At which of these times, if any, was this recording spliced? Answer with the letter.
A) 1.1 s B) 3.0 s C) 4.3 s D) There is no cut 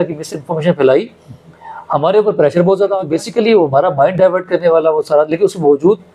B